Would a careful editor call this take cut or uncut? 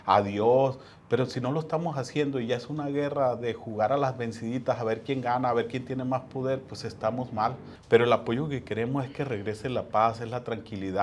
cut